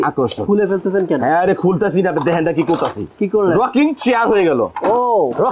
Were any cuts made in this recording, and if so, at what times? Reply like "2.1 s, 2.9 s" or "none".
3.1 s